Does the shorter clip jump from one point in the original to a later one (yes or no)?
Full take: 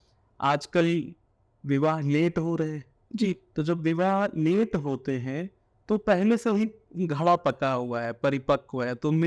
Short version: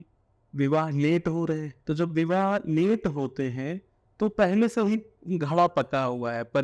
yes